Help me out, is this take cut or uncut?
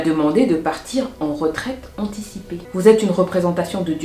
cut